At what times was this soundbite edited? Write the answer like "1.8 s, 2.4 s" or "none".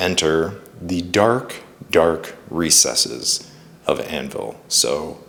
none